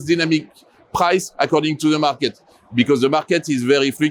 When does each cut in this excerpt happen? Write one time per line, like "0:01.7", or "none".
none